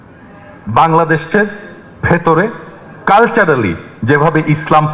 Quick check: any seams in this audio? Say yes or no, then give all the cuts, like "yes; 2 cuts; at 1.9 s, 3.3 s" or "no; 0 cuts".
no; 0 cuts